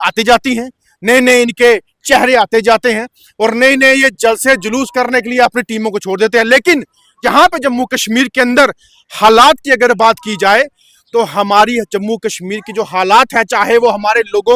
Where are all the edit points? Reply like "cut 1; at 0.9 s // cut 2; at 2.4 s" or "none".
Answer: cut 1; at 7.2 s